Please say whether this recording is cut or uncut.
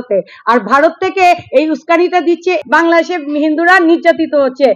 cut